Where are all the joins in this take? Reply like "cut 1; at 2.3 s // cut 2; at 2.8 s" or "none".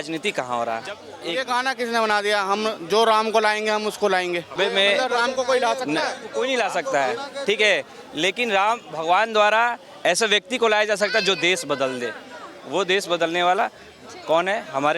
cut 1; at 1.1 s // cut 2; at 4.5 s // cut 3; at 6.2 s